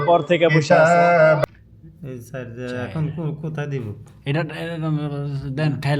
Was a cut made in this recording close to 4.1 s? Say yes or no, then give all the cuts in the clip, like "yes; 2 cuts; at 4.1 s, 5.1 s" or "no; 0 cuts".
no; 1 cut; at 1.4 s